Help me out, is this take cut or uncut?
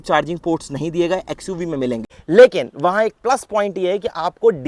cut